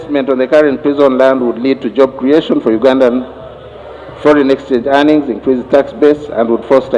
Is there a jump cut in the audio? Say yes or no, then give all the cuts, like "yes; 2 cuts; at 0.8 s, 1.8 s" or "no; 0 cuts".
no; 0 cuts